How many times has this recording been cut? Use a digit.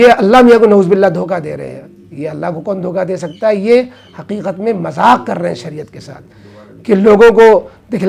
0